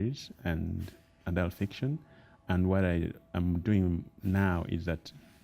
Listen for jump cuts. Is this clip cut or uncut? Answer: cut